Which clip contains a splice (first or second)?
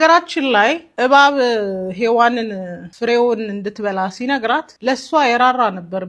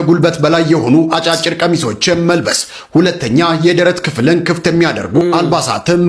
first